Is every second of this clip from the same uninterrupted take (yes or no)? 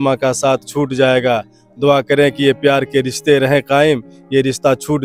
yes